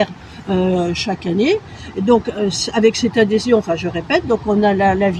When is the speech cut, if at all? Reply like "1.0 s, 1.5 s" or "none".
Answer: none

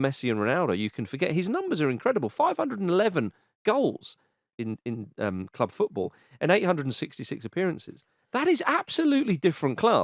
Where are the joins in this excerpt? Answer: 4.5 s

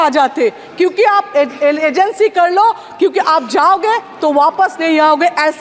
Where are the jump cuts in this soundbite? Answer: none

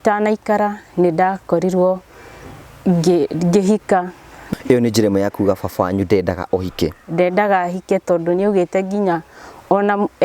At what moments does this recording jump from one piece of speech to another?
4.4 s

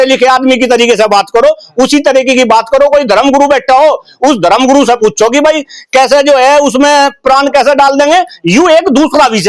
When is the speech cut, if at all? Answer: none

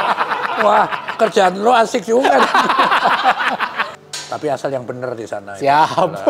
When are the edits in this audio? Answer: 3.9 s

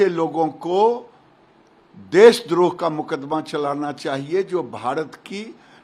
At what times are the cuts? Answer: none

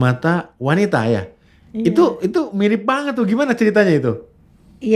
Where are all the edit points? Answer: none

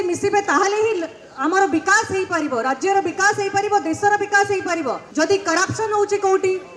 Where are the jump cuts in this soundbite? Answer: 5.0 s

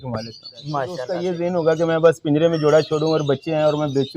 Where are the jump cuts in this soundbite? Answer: 1.1 s

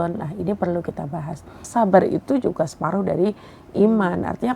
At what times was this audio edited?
1.6 s

